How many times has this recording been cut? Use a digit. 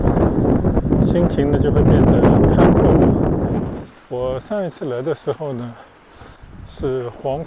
1